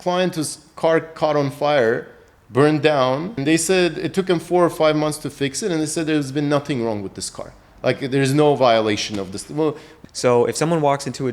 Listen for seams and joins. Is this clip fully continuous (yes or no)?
no